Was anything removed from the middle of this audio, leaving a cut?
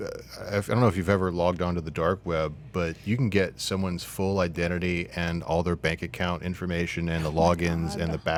no; 0 cuts

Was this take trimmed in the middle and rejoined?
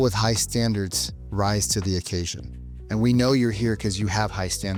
no; 0 cuts

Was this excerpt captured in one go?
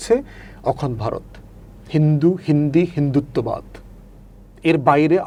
yes; 0 cuts

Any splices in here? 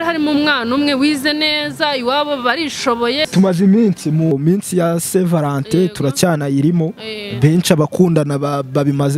yes; 2 cuts; at 3.3 s, 4.3 s

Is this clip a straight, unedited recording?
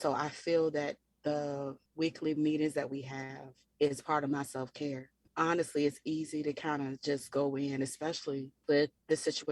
no; 1 cut; at 5.2 s

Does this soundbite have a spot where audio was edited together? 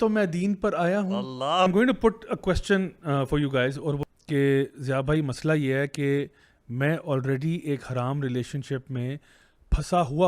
yes; 2 cuts; at 1.7 s, 4.0 s

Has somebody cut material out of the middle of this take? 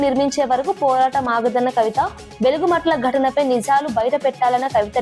yes; 1 cut; at 2.8 s

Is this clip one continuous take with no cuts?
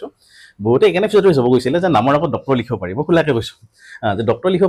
yes; 0 cuts

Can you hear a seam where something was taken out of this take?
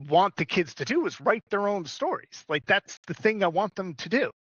no; 0 cuts

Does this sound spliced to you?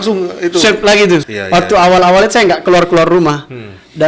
yes; 1 cut; at 1.2 s

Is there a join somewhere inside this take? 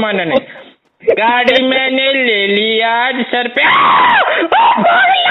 no; 0 cuts

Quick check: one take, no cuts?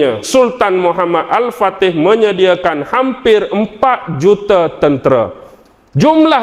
yes; 0 cuts

